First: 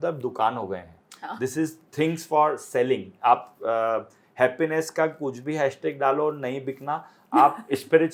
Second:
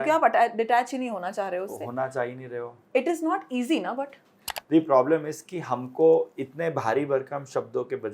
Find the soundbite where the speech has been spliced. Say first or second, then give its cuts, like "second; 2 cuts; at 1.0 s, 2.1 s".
second; 1 cut; at 4.5 s